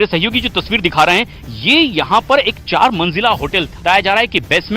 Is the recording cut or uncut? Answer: cut